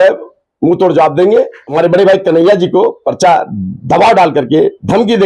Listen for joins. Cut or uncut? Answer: cut